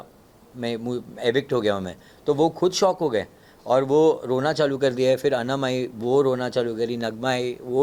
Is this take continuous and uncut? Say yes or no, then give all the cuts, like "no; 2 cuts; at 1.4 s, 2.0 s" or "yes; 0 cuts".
yes; 0 cuts